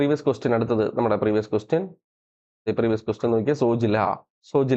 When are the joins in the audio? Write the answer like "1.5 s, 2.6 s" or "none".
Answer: none